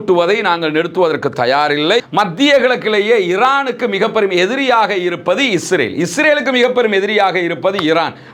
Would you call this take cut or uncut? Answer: cut